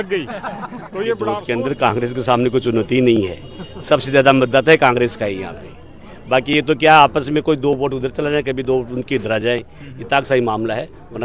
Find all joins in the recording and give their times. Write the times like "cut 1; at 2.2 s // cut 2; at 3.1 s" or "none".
cut 1; at 1.4 s